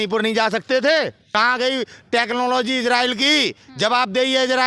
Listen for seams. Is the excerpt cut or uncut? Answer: cut